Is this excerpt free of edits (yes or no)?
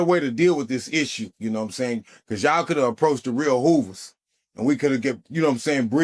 yes